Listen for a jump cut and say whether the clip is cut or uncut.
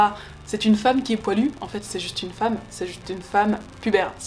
uncut